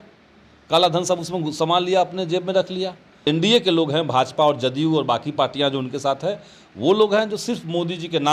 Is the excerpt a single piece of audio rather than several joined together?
no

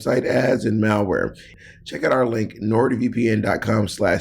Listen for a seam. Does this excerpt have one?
yes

